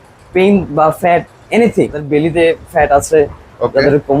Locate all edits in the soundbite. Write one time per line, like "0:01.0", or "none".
0:02.0